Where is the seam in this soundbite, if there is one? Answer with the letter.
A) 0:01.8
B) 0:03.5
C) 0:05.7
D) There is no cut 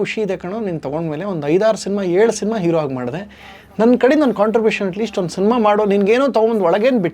D